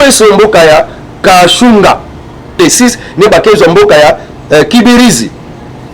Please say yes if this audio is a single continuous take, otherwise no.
no